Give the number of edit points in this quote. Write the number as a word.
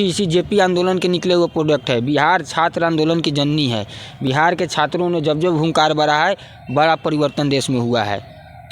zero